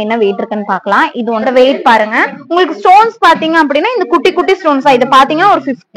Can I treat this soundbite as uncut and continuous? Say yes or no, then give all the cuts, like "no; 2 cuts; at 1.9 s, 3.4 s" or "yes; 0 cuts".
no; 1 cut; at 1.5 s